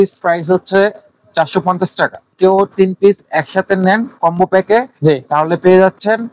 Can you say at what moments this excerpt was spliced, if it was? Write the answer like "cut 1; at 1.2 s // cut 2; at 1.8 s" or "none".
cut 1; at 2.4 s